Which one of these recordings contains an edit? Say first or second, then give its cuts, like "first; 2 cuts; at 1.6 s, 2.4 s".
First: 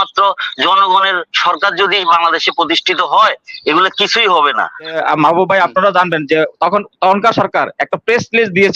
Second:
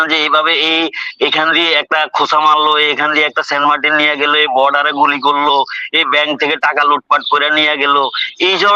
first; 1 cut; at 5.0 s